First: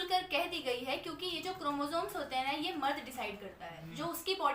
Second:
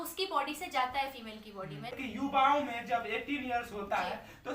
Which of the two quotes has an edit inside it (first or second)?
second